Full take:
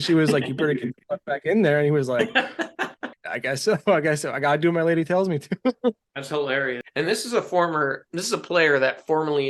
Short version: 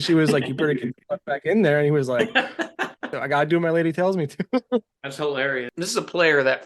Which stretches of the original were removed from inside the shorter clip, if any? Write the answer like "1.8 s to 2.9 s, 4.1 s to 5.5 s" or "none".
3.2 s to 4.3 s, 6.8 s to 8.1 s

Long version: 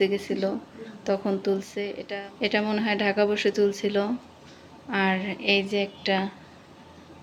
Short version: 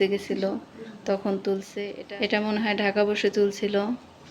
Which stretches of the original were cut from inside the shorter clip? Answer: 2.0 s to 2.2 s

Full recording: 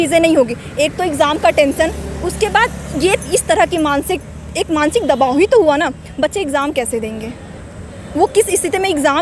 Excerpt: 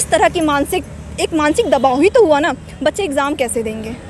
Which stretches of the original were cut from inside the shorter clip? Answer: none

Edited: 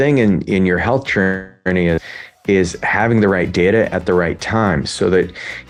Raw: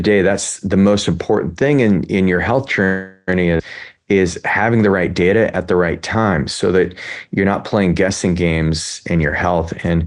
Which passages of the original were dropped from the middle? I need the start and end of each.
none

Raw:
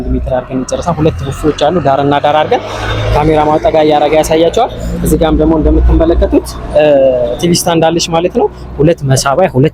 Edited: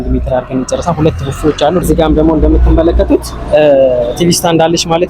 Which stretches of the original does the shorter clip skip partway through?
1.8 s to 5.0 s

